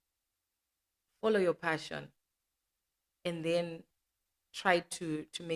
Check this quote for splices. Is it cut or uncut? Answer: uncut